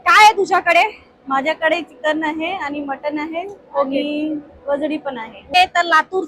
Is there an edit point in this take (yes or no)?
yes